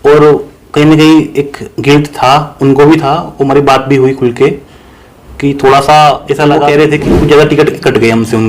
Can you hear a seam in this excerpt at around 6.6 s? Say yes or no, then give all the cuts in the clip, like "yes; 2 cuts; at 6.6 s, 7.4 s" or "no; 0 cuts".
yes; 1 cut; at 6.6 s